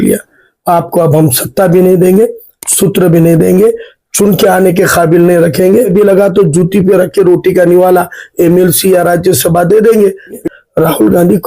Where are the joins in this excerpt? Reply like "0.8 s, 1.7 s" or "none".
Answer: 5.9 s, 10.5 s